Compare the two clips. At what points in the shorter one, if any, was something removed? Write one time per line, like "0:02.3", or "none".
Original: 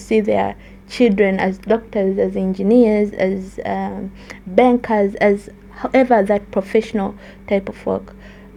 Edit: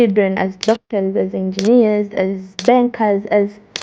0:02.5